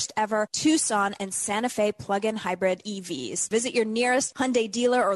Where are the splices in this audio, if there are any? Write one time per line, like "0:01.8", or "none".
0:03.4